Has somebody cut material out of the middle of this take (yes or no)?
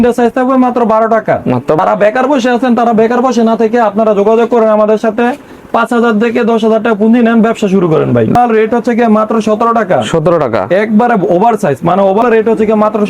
yes